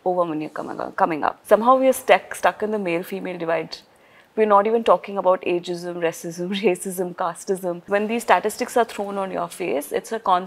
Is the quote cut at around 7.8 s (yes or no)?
yes